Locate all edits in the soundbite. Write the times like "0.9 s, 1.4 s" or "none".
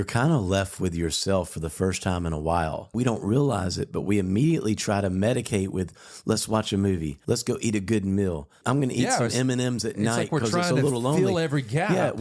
2.9 s, 7.2 s, 8.5 s

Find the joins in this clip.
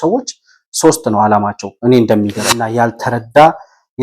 2.6 s

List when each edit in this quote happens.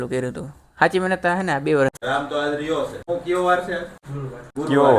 2.0 s

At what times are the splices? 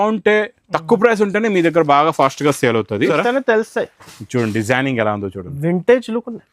3.1 s

